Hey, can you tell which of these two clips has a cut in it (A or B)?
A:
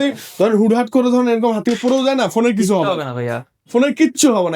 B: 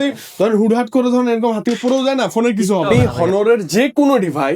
B